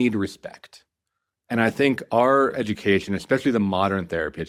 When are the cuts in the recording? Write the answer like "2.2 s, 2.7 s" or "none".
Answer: none